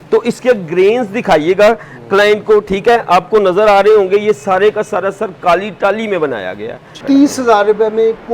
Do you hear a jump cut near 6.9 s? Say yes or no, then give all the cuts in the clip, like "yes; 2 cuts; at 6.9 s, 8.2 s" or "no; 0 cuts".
yes; 1 cut; at 6.9 s